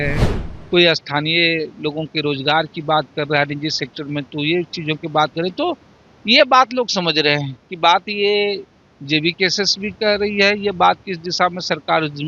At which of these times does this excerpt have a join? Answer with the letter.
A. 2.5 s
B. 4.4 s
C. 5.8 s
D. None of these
D